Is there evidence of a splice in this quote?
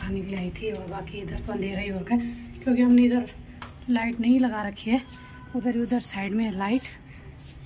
no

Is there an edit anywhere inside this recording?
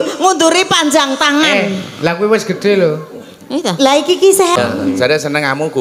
yes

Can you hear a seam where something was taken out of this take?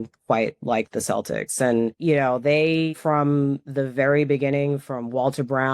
yes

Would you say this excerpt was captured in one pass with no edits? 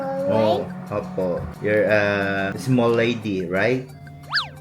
no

